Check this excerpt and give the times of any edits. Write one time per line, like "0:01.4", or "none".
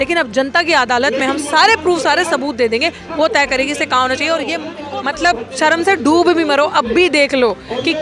0:04.7